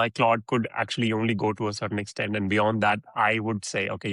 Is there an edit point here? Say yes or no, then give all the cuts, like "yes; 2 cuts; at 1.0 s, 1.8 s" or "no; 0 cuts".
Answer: no; 0 cuts